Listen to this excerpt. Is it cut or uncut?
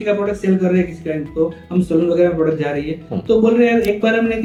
uncut